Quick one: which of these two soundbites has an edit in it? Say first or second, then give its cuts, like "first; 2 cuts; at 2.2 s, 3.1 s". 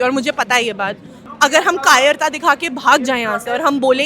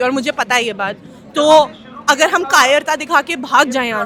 first; 1 cut; at 1.2 s